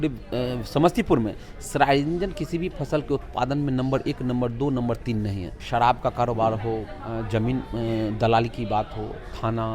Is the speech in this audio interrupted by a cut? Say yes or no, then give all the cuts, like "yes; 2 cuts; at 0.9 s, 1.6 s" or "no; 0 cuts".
yes; 1 cut; at 5.5 s